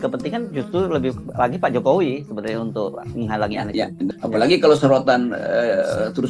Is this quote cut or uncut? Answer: cut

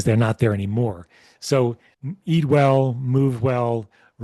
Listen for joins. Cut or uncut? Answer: cut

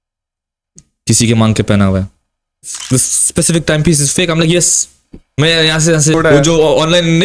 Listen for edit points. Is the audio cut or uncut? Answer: cut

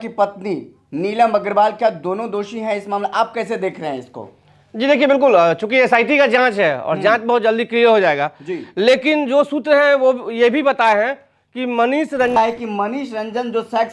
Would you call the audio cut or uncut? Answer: cut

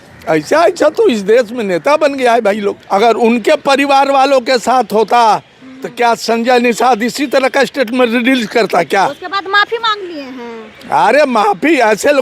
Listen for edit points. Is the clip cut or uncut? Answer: cut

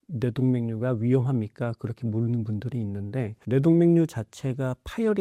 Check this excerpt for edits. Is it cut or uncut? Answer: uncut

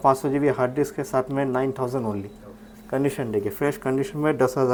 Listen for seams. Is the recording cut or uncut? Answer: uncut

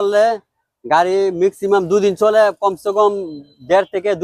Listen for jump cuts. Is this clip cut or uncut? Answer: uncut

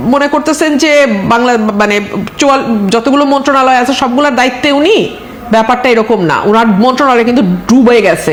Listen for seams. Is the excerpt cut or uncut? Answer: uncut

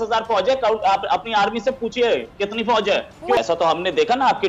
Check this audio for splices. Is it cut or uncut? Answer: cut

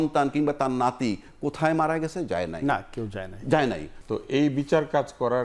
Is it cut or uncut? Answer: cut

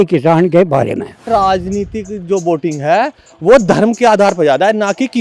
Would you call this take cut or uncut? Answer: cut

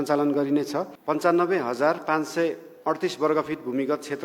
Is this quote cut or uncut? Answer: cut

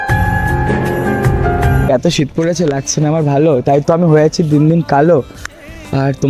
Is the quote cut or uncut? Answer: cut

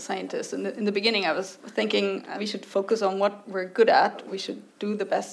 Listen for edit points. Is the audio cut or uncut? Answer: cut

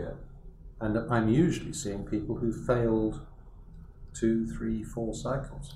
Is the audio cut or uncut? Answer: uncut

